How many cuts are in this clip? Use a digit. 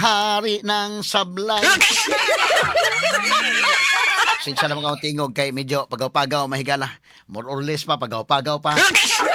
0